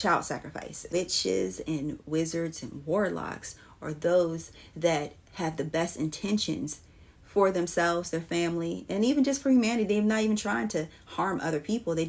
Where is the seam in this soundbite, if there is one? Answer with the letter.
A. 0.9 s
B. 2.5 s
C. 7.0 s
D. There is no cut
A